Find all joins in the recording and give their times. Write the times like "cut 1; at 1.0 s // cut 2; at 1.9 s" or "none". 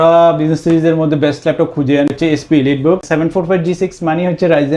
cut 1; at 2.1 s // cut 2; at 3.0 s